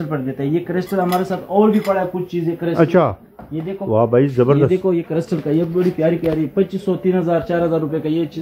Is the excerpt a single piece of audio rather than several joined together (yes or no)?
yes